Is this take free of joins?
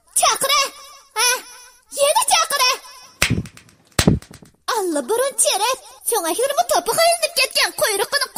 no; 1 cut; at 5.9 s

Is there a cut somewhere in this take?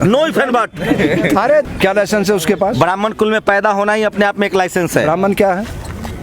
yes; 1 cut; at 1.7 s

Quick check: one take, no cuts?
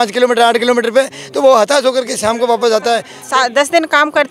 no; 1 cut; at 3.1 s

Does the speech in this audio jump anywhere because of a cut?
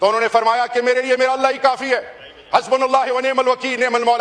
no; 0 cuts

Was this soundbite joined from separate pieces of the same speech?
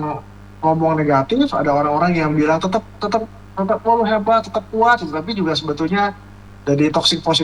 no; 0 cuts

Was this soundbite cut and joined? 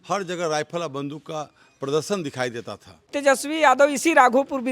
yes; 1 cut; at 3.1 s

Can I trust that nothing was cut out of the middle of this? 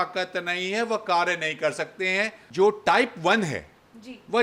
no; 1 cut; at 2.4 s

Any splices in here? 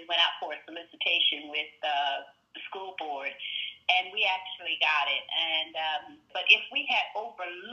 yes; 1 cut; at 6.2 s

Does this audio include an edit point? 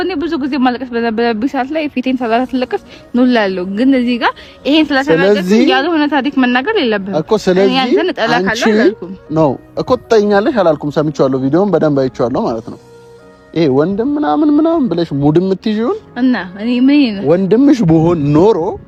no; 0 cuts

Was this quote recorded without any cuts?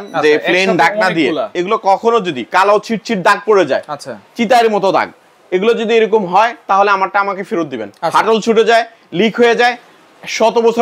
no; 1 cut; at 1.5 s

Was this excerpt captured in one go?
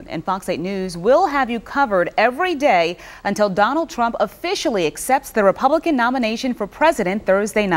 yes; 0 cuts

